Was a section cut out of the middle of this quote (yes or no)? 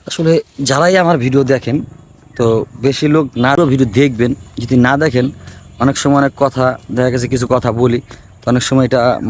yes